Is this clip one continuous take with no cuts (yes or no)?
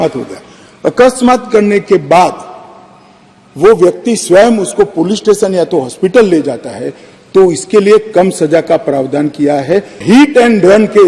no